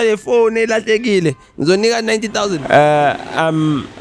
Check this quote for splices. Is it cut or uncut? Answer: cut